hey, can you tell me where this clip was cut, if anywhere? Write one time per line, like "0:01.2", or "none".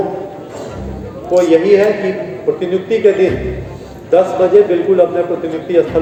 none